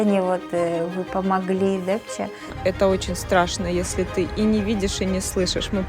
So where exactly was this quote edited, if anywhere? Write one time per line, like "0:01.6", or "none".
0:02.5